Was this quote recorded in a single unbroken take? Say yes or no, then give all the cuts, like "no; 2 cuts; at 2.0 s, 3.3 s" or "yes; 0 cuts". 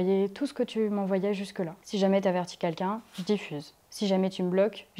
yes; 0 cuts